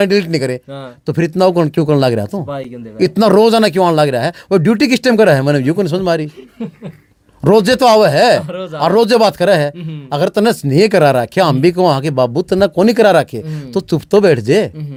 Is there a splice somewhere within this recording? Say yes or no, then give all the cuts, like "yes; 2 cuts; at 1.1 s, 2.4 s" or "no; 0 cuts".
no; 0 cuts